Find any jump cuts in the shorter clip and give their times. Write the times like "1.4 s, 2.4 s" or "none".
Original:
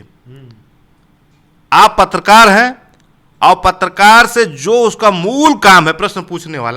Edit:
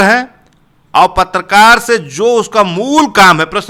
none